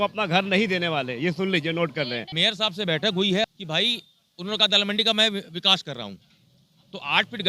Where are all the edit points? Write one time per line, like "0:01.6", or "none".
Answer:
0:02.2
0:03.4

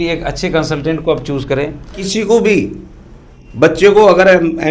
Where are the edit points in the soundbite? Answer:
0:02.1

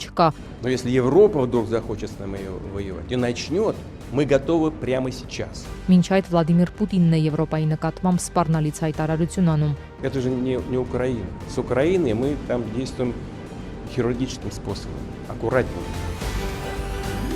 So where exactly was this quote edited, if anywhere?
0:15.9

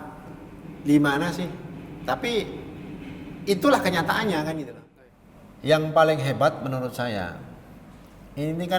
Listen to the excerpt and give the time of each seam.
0:04.8

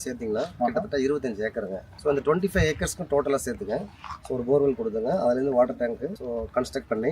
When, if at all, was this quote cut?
0:01.8

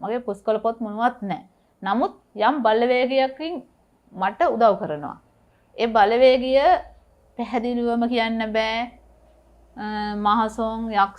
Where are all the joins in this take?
none

